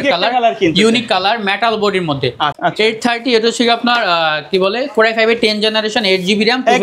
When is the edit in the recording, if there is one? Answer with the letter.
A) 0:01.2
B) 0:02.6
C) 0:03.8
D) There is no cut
B